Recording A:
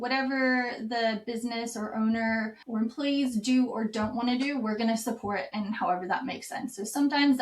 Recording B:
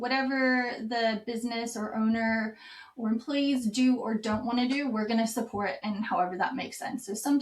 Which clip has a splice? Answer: A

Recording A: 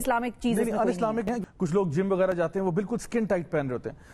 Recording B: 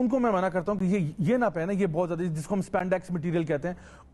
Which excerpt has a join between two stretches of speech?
A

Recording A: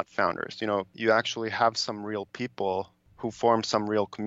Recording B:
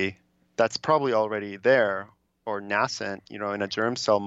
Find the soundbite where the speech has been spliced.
A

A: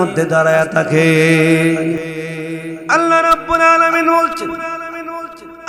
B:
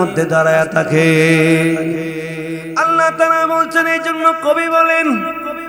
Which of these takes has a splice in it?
A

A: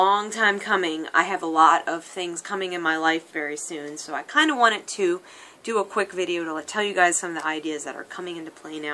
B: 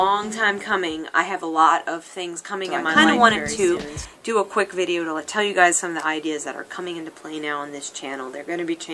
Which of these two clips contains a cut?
B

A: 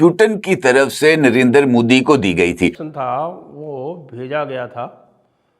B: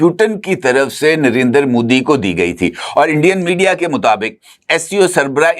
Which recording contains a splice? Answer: A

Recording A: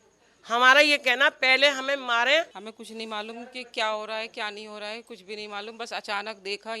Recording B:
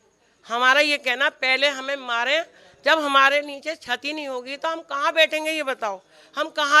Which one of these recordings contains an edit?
A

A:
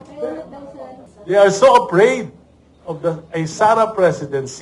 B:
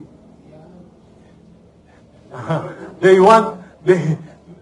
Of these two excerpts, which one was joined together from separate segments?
A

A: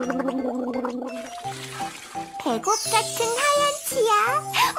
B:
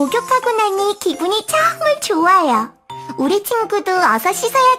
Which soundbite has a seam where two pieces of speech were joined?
A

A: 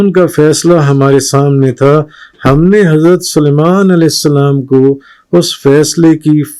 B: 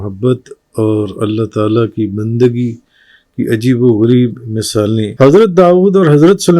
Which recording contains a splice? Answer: B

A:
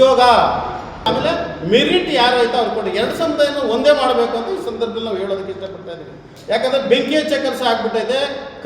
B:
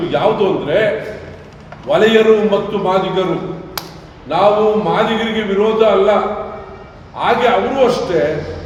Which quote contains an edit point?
A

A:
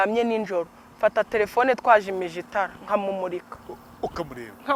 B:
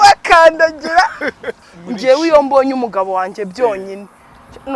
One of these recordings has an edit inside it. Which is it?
B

